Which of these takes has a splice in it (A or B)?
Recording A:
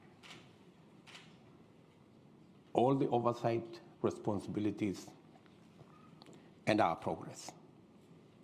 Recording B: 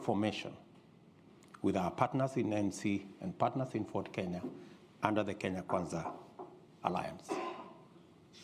A